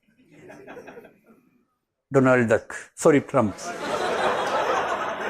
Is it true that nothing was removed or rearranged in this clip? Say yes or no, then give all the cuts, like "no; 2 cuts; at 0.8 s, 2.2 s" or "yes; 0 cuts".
yes; 0 cuts